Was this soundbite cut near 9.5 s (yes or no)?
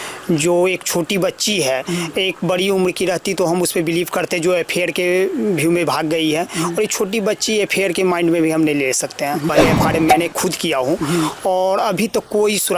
yes